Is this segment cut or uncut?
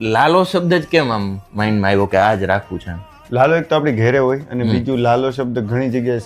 cut